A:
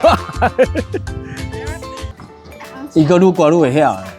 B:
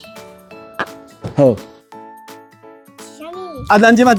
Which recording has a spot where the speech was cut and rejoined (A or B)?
A